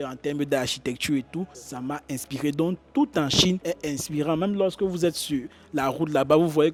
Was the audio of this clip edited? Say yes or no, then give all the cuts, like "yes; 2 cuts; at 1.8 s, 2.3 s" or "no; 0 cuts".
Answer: no; 0 cuts